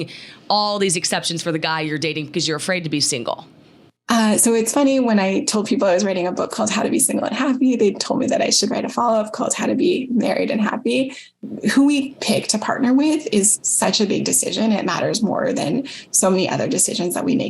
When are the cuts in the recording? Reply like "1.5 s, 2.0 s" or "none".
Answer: 4.0 s